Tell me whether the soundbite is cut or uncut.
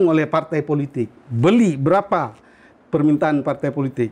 uncut